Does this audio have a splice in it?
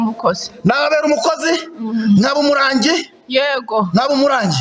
no; 0 cuts

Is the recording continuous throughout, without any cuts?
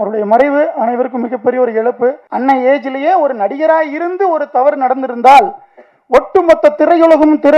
no; 1 cut; at 2.3 s

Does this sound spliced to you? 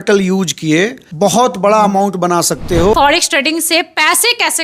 yes; 2 cuts; at 1.0 s, 2.8 s

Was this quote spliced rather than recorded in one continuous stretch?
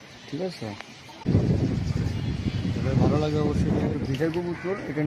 yes; 2 cuts; at 1.2 s, 3.9 s

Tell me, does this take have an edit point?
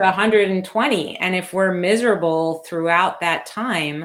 no; 0 cuts

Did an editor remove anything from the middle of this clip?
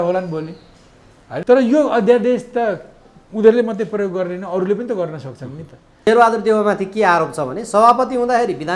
yes; 2 cuts; at 1.4 s, 6.1 s

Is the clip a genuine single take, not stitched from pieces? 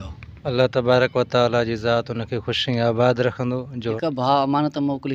no; 1 cut; at 4.0 s

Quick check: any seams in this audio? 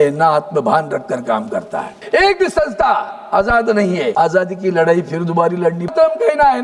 yes; 3 cuts; at 1.9 s, 4.1 s, 5.9 s

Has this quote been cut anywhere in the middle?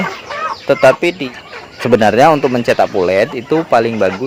yes; 1 cut; at 1.2 s

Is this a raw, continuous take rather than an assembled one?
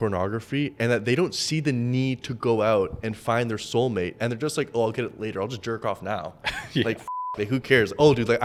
yes; 0 cuts

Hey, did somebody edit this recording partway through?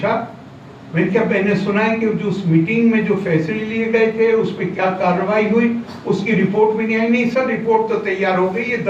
no; 0 cuts

